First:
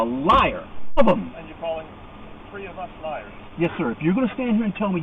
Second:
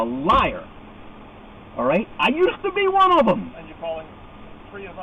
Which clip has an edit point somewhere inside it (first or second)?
first